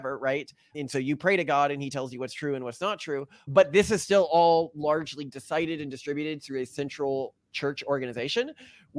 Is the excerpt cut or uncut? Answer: cut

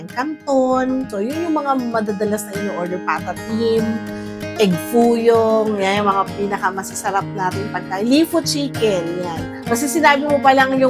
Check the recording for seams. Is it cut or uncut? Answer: cut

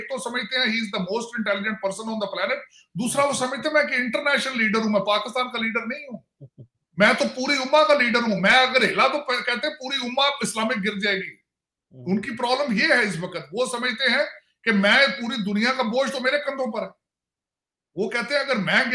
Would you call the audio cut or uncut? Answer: uncut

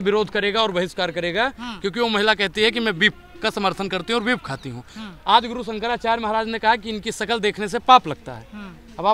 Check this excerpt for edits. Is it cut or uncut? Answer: uncut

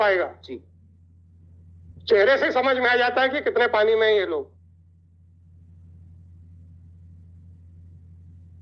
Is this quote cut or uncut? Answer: uncut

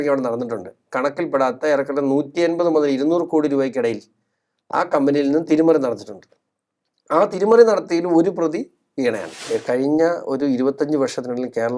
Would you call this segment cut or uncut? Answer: cut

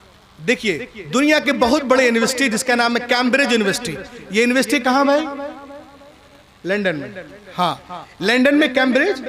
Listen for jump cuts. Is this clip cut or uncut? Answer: uncut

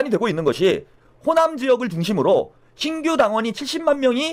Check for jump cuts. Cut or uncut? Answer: uncut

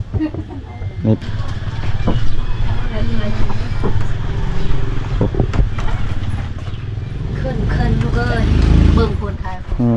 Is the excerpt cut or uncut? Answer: cut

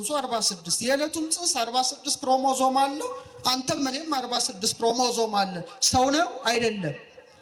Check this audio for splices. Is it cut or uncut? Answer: uncut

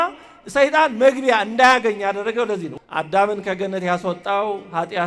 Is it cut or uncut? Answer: cut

